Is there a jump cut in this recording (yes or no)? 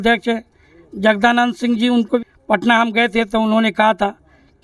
yes